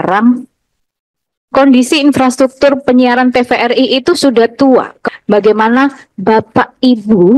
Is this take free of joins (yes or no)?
no